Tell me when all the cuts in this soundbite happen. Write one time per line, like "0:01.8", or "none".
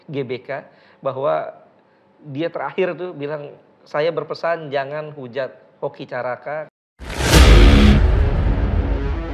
0:06.7